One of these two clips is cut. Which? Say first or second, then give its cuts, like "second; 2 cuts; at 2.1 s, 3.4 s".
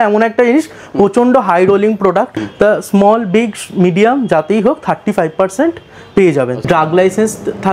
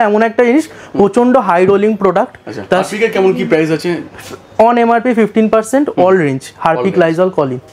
first; 2 cuts; at 2.4 s, 6.6 s